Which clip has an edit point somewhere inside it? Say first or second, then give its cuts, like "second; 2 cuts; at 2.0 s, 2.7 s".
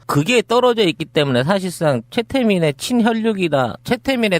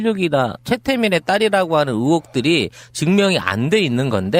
first; 1 cut; at 1.2 s